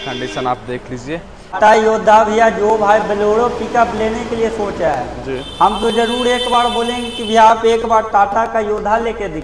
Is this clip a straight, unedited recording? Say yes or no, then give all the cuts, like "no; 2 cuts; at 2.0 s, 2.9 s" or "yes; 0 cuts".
no; 1 cut; at 1.5 s